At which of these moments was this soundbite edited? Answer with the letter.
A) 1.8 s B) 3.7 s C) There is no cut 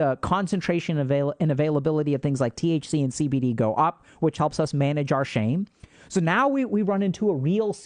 C